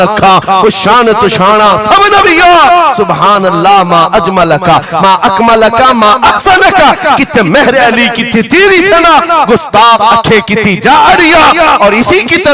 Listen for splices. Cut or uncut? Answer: uncut